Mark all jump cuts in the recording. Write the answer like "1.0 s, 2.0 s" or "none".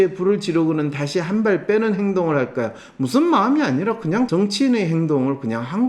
4.3 s